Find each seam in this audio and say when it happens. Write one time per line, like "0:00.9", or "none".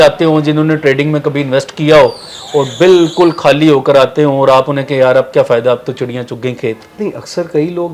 none